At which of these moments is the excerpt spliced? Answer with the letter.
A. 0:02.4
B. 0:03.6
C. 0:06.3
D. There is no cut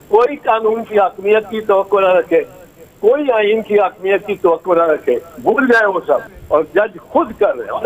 C